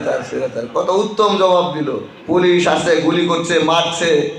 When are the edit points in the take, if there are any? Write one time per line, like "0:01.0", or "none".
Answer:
0:02.1